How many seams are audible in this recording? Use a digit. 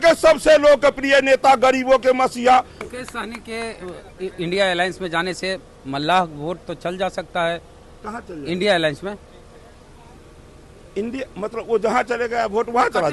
1